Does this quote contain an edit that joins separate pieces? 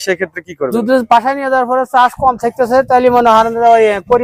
no; 0 cuts

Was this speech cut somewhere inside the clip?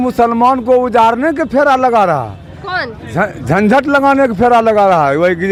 no; 0 cuts

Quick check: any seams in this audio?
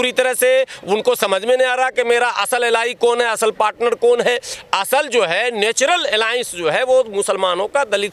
no; 0 cuts

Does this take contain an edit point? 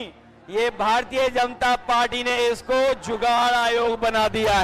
no; 0 cuts

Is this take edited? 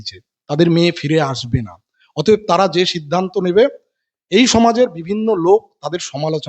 no; 0 cuts

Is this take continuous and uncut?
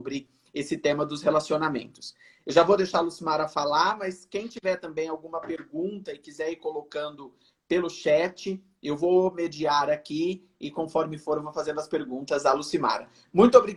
yes; 0 cuts

